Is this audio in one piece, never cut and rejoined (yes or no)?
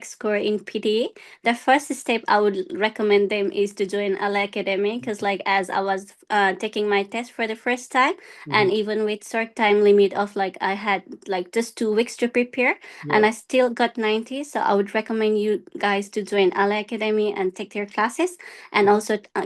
yes